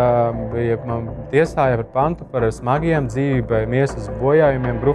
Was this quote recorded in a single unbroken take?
yes; 0 cuts

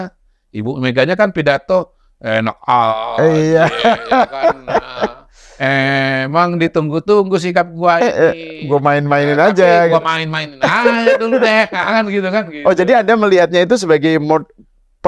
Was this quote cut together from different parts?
no; 0 cuts

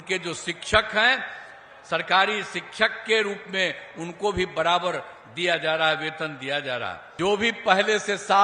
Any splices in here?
yes; 1 cut; at 7.0 s

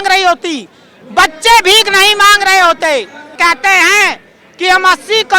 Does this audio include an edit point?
yes; 1 cut; at 3.3 s

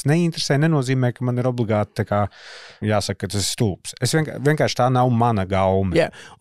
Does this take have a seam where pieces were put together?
yes; 1 cut; at 2.7 s

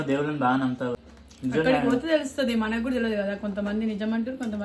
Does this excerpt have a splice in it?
yes; 1 cut; at 1.0 s

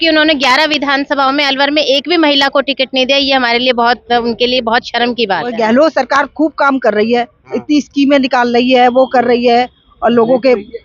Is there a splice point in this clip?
yes; 1 cut; at 5.5 s

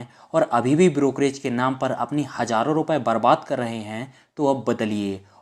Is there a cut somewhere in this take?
no; 0 cuts

